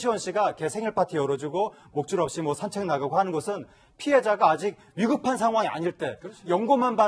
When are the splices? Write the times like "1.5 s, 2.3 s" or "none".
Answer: 1.5 s